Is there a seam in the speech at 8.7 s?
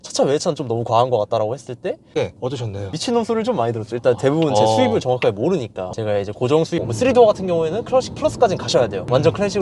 no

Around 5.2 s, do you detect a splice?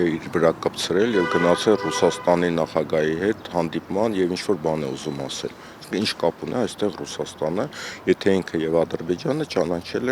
no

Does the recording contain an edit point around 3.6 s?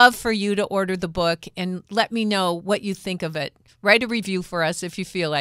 no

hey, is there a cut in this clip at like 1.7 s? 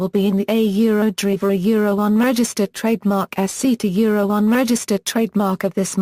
no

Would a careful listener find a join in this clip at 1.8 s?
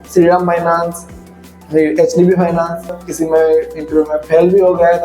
no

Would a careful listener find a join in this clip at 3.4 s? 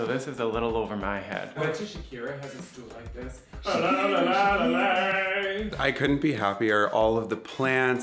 no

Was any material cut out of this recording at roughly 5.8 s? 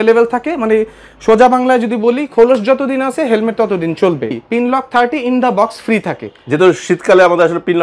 no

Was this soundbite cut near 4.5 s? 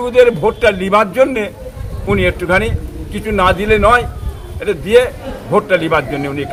no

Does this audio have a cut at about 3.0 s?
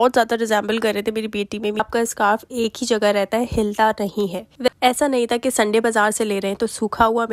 no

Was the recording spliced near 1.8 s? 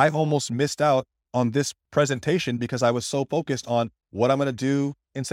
yes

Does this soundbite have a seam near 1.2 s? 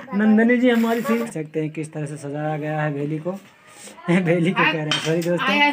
yes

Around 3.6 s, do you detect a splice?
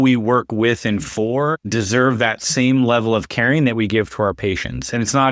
no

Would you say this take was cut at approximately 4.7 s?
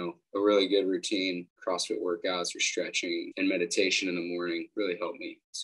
yes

